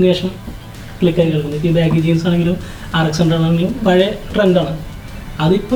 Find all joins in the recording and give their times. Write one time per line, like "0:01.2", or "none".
none